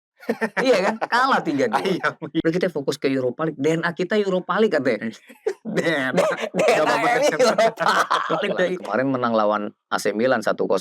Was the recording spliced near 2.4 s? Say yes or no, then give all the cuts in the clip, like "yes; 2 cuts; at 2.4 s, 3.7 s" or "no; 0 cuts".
yes; 2 cuts; at 2.4 s, 8.8 s